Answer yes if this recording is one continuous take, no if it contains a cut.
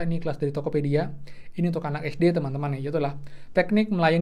yes